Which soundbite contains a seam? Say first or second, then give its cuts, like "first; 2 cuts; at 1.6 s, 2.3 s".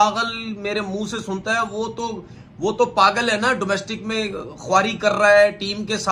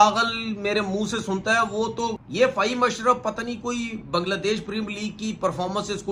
second; 1 cut; at 2.2 s